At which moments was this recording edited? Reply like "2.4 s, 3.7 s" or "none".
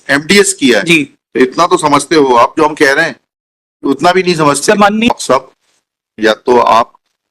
5.1 s